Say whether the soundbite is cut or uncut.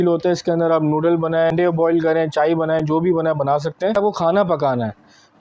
cut